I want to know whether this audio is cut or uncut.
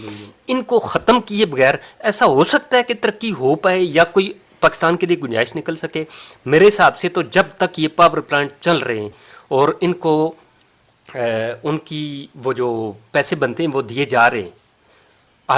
uncut